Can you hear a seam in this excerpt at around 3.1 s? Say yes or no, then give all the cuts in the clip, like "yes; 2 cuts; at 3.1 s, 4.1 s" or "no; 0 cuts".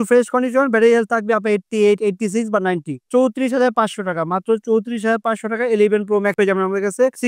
yes; 1 cut; at 3.1 s